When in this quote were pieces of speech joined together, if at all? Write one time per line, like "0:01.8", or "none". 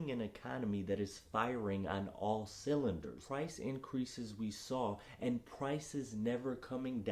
0:03.2

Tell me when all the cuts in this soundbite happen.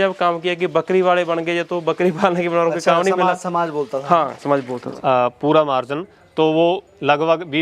0:04.8

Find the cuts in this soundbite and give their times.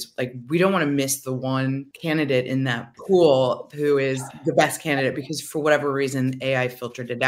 0:01.9
0:02.9
0:04.3

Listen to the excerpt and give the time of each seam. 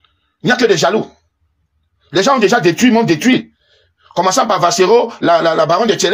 none

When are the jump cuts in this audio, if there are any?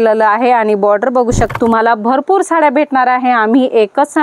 0:01.5

